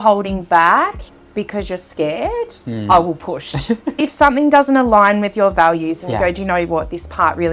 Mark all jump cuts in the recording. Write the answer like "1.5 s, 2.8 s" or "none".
4.0 s